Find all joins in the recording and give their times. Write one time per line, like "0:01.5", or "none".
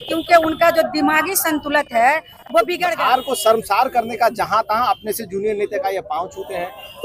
0:02.8